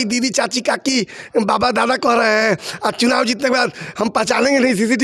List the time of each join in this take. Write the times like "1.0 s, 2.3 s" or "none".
none